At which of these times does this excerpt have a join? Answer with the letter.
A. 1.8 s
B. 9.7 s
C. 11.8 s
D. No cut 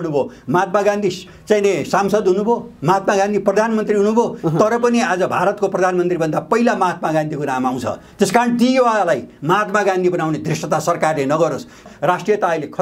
C